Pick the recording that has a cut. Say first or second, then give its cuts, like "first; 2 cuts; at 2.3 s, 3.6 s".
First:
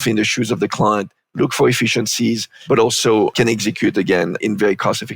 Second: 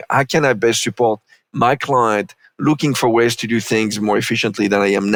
first; 3 cuts; at 2.5 s, 3.3 s, 4.4 s